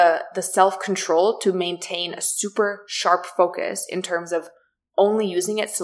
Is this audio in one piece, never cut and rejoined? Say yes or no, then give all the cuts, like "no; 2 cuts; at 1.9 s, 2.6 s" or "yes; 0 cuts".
yes; 0 cuts